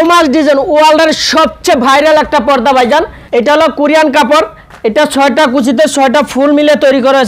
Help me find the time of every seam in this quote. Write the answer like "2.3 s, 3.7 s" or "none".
3.2 s

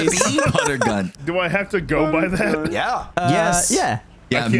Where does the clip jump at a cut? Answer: 1.2 s, 2.7 s

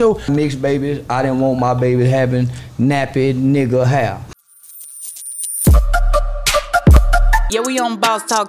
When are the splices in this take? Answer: 4.3 s

